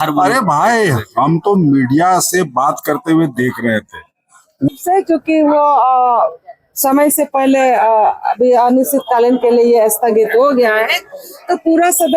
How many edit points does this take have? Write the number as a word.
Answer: one